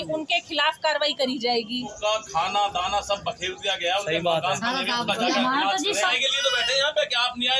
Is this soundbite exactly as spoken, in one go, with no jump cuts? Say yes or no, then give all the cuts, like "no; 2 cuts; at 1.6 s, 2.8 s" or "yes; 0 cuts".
no; 2 cuts; at 1.9 s, 6.1 s